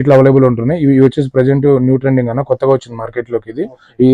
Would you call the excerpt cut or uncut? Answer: uncut